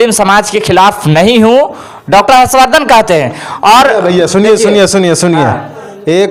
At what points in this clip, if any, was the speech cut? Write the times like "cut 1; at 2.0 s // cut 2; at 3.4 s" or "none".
none